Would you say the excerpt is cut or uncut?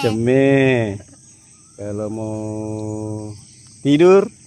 uncut